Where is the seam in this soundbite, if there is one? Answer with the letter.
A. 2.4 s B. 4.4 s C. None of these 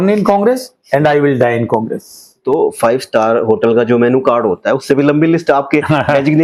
A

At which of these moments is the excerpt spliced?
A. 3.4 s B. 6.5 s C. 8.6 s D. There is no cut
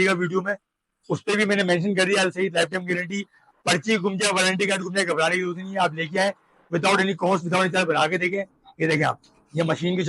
C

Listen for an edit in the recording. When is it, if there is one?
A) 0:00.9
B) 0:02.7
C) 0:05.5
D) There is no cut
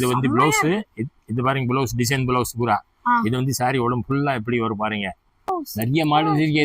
C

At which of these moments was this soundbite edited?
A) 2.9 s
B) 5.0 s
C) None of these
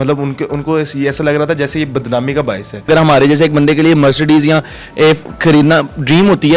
A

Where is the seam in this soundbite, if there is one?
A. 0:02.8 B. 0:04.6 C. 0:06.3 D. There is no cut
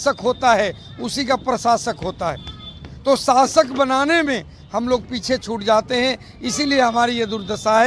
D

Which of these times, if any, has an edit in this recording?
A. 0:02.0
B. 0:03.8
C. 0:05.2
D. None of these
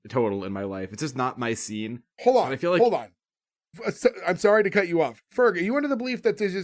D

